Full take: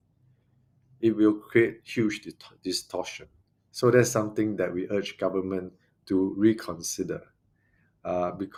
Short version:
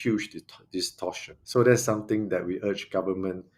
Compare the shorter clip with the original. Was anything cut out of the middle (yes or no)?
yes